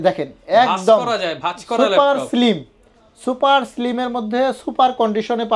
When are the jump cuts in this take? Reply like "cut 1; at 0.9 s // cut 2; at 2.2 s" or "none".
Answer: none

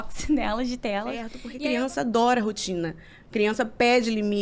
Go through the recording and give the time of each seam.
cut 1; at 1.4 s

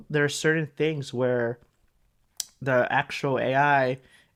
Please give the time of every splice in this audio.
none

